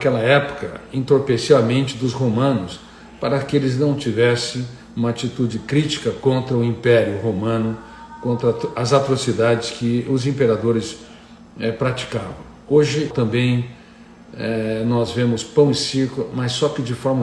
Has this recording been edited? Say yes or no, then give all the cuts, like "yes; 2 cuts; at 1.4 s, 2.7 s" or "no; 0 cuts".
yes; 1 cut; at 13.1 s